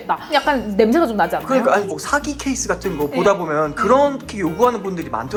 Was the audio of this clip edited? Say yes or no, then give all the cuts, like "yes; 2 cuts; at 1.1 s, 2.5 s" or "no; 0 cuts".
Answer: no; 0 cuts